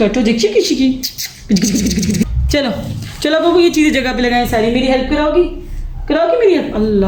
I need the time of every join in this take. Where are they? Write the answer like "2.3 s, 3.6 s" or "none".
2.2 s